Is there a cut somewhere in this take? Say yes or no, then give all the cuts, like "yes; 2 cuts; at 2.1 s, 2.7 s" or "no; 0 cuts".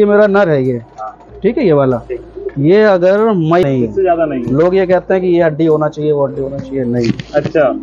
yes; 1 cut; at 3.6 s